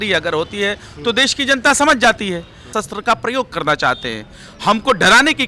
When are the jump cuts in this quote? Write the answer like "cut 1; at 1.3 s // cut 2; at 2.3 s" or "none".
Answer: cut 1; at 2.6 s